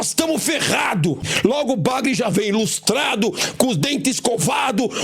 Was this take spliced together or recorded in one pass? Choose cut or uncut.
cut